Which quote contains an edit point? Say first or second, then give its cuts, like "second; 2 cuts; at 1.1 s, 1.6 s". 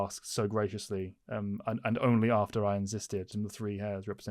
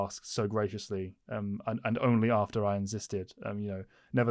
first; 1 cut; at 3.3 s